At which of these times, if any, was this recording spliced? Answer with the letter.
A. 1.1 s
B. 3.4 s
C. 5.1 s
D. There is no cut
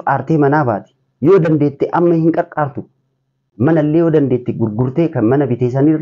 B